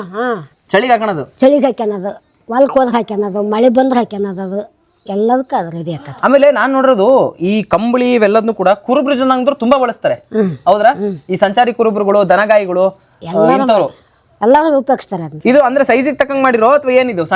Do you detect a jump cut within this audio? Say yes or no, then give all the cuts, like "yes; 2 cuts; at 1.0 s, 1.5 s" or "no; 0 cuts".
no; 0 cuts